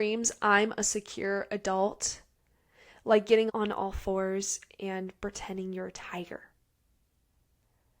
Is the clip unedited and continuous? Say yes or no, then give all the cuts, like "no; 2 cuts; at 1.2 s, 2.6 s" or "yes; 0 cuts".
no; 1 cut; at 3.5 s